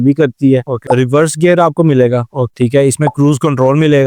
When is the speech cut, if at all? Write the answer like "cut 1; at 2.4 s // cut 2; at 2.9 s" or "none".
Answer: cut 1; at 0.9 s // cut 2; at 2.4 s